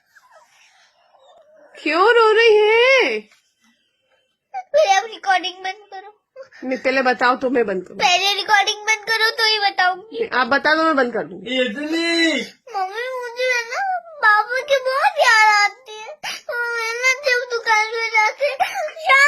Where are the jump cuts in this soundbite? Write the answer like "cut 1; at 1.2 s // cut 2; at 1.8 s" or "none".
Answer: cut 1; at 1.4 s

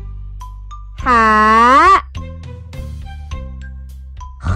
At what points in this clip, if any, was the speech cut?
cut 1; at 1.1 s // cut 2; at 2.1 s // cut 3; at 3.9 s

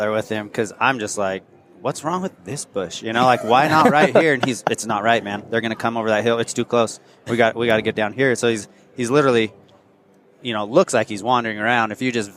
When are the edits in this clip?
none

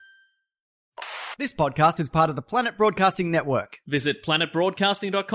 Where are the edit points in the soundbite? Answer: cut 1; at 1.0 s

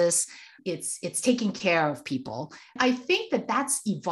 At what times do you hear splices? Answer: cut 1; at 2.8 s

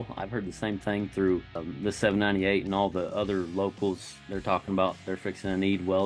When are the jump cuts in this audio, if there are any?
cut 1; at 5.1 s

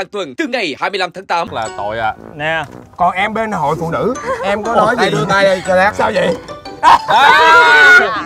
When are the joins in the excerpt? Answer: cut 1; at 1.5 s

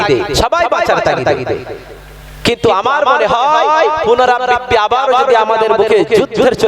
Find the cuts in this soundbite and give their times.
none

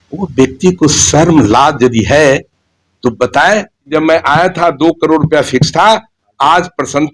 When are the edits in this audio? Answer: cut 1; at 3.9 s

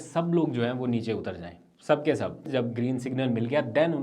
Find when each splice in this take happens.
cut 1; at 2.5 s

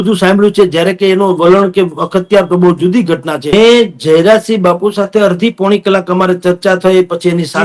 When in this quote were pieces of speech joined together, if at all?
cut 1; at 3.5 s

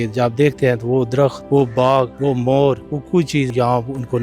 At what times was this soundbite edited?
cut 1; at 1.4 s // cut 2; at 2.1 s // cut 3; at 3.4 s

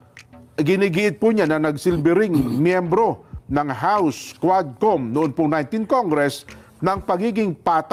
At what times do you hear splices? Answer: none

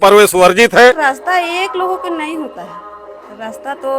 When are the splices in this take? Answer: cut 1; at 1.0 s

